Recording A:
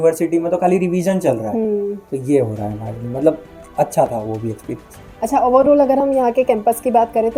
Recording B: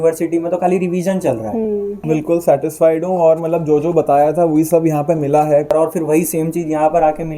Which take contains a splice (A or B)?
B